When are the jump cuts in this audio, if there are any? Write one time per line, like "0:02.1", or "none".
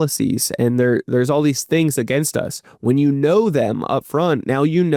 none